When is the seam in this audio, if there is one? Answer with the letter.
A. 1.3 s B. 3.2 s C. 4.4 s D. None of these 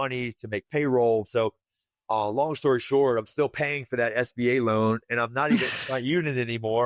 A